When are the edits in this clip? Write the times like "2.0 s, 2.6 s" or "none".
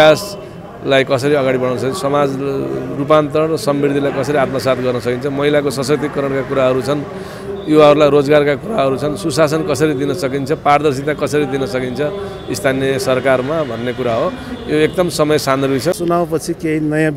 16.0 s